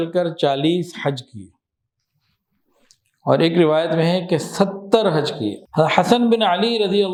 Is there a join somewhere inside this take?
no; 0 cuts

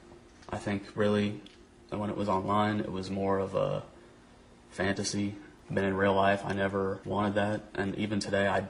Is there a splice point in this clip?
yes; 2 cuts; at 5.5 s, 7.0 s

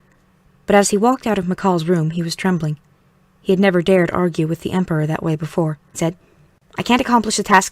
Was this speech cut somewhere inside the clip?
no; 0 cuts

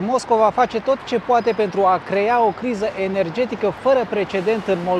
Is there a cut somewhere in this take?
no; 0 cuts

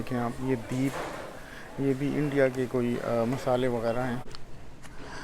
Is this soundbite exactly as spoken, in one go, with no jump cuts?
no; 1 cut; at 4.3 s

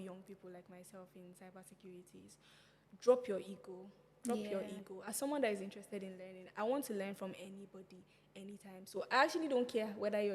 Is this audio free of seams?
yes; 0 cuts

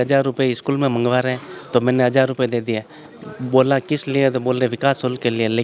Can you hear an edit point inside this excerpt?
no; 0 cuts

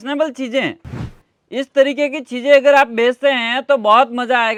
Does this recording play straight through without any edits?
yes; 0 cuts

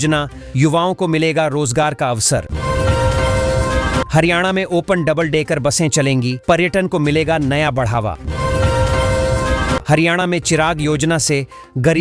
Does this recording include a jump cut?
no; 0 cuts

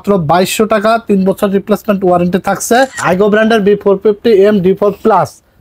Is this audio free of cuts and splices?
no; 1 cut; at 3.0 s

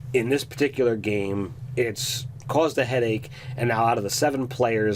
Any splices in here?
yes; 1 cut; at 2.2 s

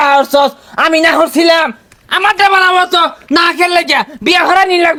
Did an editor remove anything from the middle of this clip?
no; 0 cuts

